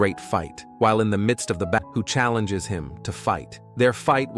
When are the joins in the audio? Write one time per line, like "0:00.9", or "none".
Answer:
0:01.8